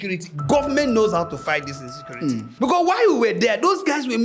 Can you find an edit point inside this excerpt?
yes; 1 cut; at 2.5 s

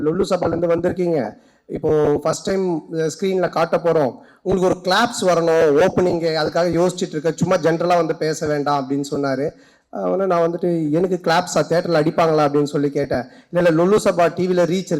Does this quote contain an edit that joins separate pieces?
no; 0 cuts

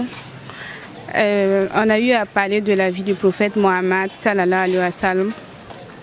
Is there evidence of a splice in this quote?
no; 0 cuts

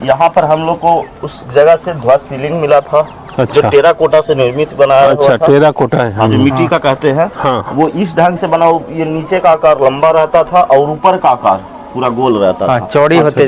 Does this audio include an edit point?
no; 0 cuts

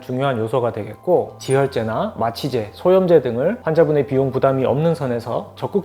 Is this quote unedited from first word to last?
no; 1 cut; at 1.3 s

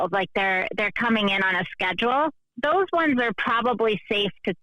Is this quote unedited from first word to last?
no; 1 cut; at 2.4 s

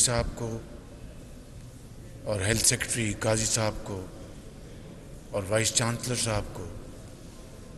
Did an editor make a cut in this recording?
no; 0 cuts

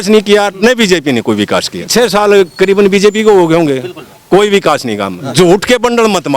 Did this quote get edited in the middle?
yes; 2 cuts; at 1.8 s, 5.2 s

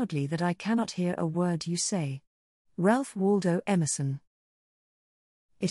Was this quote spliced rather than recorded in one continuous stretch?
yes; 1 cut; at 4.8 s

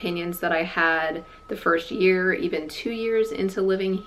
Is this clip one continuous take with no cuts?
yes; 0 cuts

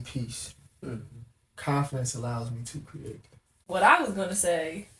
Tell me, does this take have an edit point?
yes; 1 cut; at 3.6 s

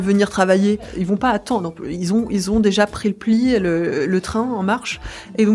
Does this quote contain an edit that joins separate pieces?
yes; 1 cut; at 0.9 s

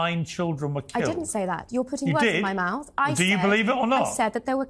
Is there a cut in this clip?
no; 0 cuts

